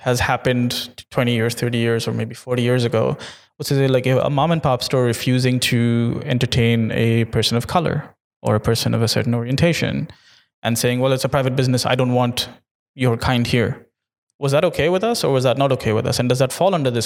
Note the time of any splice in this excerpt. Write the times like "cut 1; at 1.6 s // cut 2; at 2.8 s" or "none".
none